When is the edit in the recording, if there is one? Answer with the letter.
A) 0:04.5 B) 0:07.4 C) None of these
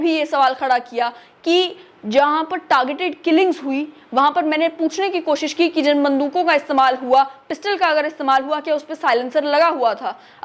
C